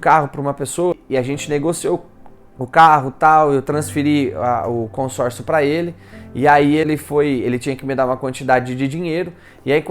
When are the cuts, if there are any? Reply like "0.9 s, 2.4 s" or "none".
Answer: 1.0 s, 6.9 s